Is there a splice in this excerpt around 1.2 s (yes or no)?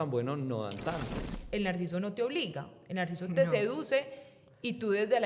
yes